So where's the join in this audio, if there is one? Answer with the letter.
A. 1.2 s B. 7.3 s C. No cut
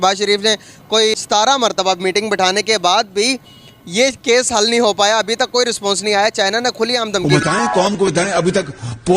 B